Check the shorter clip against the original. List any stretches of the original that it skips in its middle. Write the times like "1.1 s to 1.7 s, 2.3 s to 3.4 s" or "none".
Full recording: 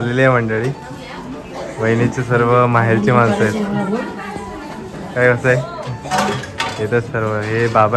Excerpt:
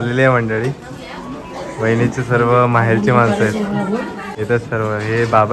4.3 s to 6.7 s